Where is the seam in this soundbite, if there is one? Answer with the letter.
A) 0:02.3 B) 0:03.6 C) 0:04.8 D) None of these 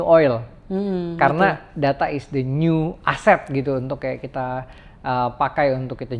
D